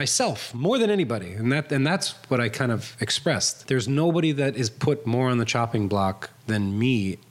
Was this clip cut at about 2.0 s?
no; 2 cuts; at 3.5 s, 6.3 s

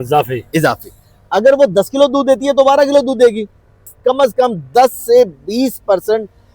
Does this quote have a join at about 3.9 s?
yes; 1 cut; at 3.9 s

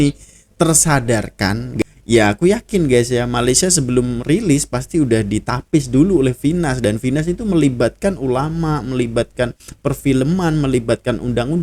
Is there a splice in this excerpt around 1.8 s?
yes; 1 cut; at 1.8 s

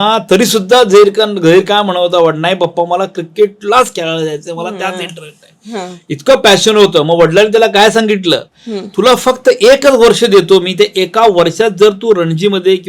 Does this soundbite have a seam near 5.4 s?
no; 0 cuts

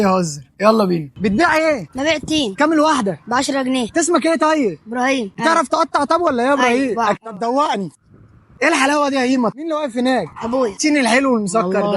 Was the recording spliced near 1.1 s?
yes; 1 cut; at 1.1 s

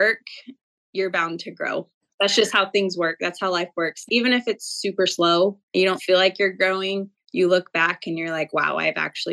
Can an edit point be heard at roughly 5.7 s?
no; 0 cuts

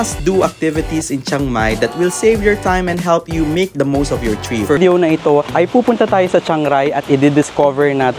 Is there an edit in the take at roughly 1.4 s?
no; 1 cut; at 4.8 s

